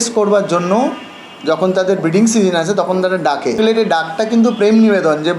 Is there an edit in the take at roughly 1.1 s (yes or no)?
no